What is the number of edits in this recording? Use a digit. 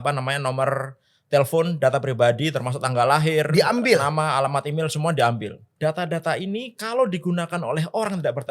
1